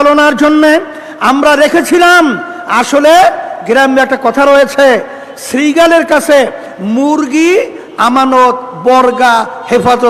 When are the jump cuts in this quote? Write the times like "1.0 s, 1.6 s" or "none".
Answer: none